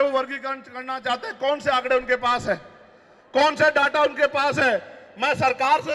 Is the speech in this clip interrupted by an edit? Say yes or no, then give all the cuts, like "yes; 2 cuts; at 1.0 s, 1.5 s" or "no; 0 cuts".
no; 0 cuts